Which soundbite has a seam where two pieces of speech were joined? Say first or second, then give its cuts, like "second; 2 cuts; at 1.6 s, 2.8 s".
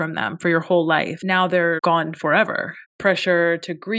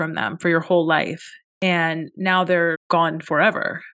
first; 2 cuts; at 1.6 s, 2.9 s